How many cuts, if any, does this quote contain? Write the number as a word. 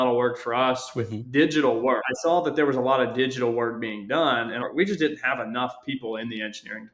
two